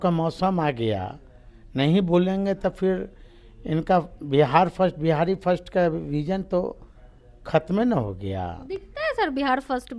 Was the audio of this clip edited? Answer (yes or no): no